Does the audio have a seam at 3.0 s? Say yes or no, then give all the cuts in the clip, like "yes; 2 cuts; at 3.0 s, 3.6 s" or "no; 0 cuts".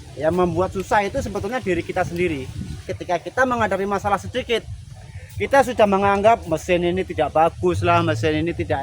yes; 1 cut; at 3.0 s